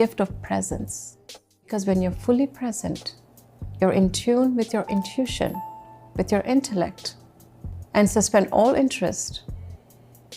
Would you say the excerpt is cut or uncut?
cut